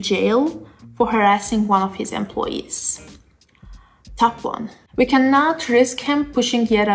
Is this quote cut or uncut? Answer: cut